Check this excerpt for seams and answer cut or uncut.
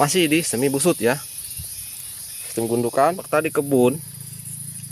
cut